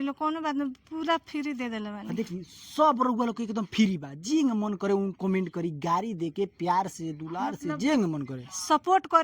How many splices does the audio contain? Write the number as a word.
zero